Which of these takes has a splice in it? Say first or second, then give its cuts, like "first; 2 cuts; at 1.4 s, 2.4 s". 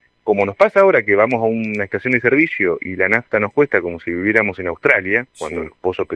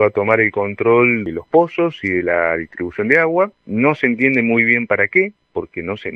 second; 2 cuts; at 1.3 s, 3.6 s